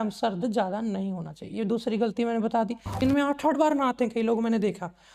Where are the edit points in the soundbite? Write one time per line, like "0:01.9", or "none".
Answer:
0:03.0